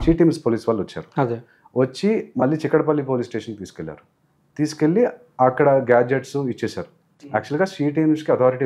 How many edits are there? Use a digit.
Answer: 0